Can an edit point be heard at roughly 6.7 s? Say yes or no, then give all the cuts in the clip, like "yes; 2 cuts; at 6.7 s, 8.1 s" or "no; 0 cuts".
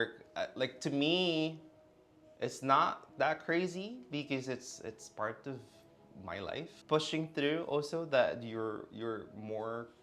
yes; 1 cut; at 6.7 s